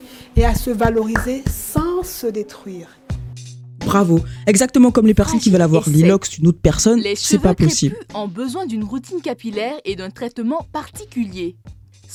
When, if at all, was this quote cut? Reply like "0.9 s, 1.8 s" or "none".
none